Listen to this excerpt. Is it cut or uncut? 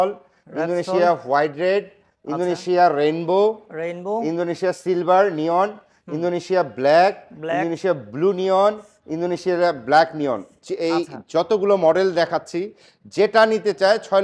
uncut